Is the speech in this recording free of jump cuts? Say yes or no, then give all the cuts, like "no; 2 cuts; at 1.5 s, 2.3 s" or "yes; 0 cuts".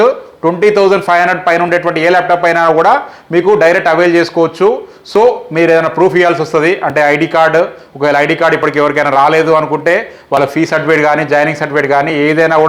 yes; 0 cuts